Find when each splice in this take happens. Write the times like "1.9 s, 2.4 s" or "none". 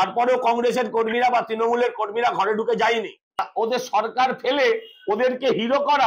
3.4 s